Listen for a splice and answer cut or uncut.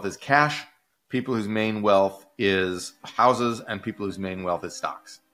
uncut